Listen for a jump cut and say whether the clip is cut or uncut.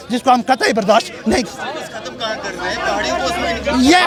uncut